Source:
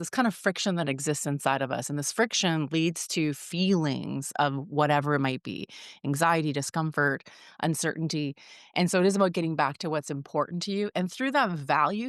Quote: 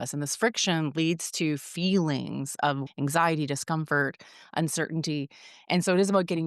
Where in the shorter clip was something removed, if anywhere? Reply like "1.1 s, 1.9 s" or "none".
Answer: 2.9 s